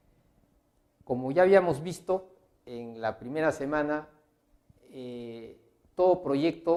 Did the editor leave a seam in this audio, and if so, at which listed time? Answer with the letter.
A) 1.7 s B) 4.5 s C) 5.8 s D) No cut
D